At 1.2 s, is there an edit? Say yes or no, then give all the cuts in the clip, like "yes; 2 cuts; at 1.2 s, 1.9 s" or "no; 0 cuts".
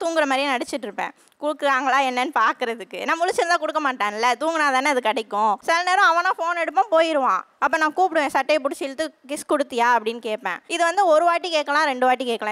no; 2 cuts; at 5.6 s, 10.6 s